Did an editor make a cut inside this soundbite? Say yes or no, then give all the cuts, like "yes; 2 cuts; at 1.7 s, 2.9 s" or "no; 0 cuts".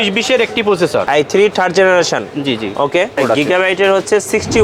yes; 2 cuts; at 1.1 s, 3.2 s